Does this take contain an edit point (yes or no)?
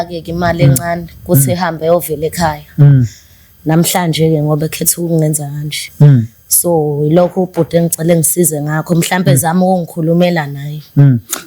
no